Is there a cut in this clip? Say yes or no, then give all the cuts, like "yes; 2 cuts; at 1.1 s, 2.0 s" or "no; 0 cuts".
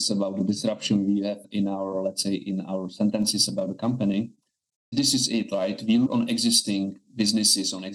yes; 3 cuts; at 1.5 s, 4.9 s, 6.1 s